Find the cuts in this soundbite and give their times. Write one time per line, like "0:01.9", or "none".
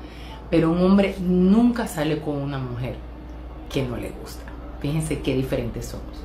0:05.1

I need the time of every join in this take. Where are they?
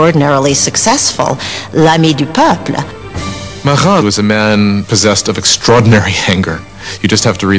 0:01.2

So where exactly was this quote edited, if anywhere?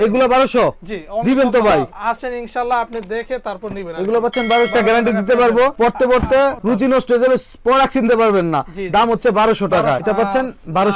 0:01.9
0:04.7
0:10.0

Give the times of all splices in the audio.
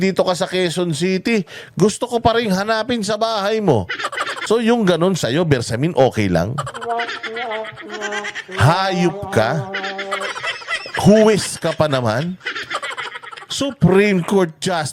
0:04.3

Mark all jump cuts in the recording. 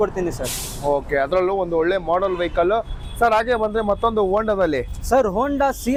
none

